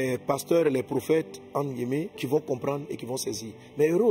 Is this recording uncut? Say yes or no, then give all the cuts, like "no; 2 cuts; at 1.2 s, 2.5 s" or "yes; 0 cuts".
no; 1 cut; at 2.1 s